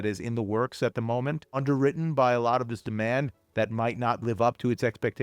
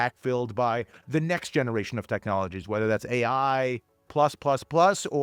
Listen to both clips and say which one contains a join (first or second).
first